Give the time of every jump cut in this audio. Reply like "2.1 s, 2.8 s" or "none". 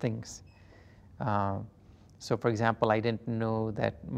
none